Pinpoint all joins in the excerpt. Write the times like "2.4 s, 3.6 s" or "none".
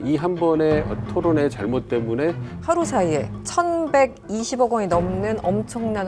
1.0 s, 2.6 s, 3.4 s